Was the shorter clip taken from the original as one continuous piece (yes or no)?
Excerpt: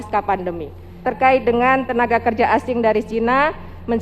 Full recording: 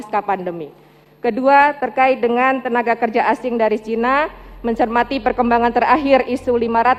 no